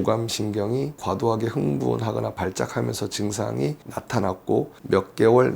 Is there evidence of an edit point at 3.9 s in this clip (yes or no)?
yes